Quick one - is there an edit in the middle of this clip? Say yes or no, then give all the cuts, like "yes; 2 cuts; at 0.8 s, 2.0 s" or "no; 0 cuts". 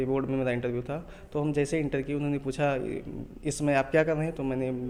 no; 0 cuts